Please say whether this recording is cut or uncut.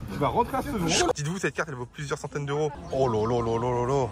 cut